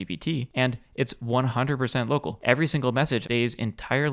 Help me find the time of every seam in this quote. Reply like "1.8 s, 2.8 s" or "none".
2.3 s, 3.2 s